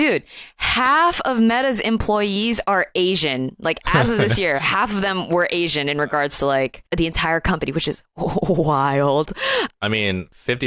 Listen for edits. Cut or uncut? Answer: cut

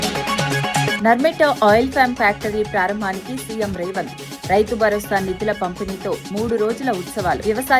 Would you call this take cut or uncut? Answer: cut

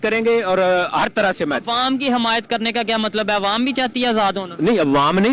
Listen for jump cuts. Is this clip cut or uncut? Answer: uncut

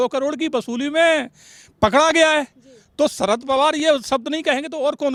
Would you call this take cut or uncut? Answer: uncut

